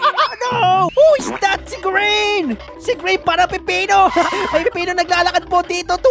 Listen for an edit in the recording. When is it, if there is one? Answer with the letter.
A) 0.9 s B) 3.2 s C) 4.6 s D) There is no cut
A